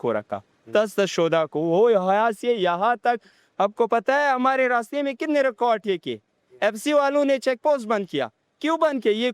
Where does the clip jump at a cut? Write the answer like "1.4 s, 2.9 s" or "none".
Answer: none